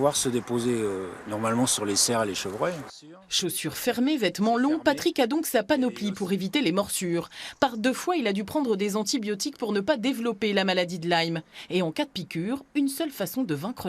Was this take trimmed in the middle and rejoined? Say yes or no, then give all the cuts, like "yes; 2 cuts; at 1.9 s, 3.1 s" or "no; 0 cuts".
no; 0 cuts